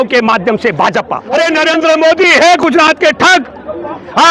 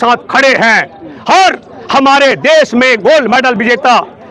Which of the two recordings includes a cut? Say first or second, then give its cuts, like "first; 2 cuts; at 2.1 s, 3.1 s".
first; 1 cut; at 1.4 s